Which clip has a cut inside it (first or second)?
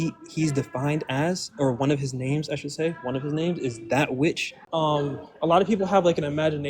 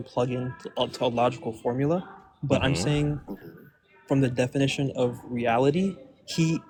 first